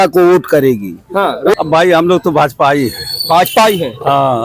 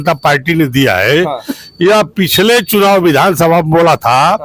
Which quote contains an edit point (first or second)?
first